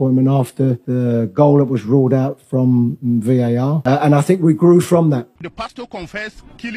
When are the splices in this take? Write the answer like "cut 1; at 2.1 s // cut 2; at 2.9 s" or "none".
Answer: cut 1; at 0.8 s // cut 2; at 3.8 s // cut 3; at 5.4 s